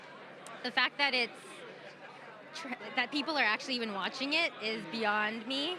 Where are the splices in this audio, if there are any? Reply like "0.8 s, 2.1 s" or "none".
none